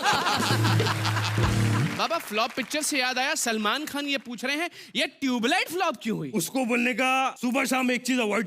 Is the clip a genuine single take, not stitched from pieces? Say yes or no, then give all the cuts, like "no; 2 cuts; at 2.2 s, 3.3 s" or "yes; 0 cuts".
no; 3 cuts; at 1.9 s, 6.3 s, 7.3 s